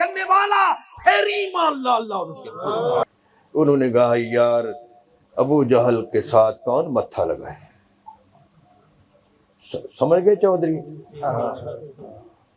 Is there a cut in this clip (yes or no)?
yes